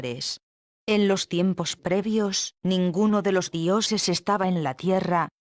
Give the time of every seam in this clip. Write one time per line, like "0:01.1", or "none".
0:02.4